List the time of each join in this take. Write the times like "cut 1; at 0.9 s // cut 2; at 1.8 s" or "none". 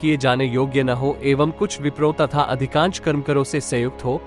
none